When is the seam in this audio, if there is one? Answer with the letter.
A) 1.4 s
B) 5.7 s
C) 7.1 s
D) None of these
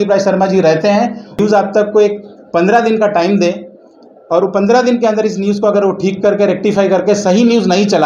A